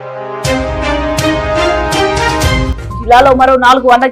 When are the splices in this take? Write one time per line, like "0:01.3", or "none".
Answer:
0:02.7